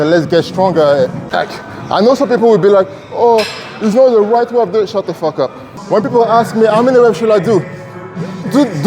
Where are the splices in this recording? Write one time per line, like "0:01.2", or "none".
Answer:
0:01.3
0:05.7